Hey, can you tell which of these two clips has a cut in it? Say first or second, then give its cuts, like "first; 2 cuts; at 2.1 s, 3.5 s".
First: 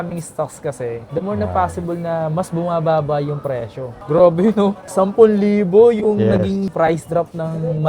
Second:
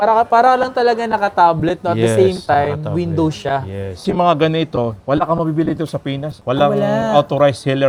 first; 1 cut; at 3.7 s